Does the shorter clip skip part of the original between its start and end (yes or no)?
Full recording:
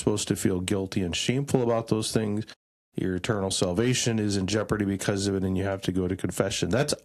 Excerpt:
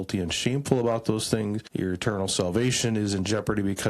yes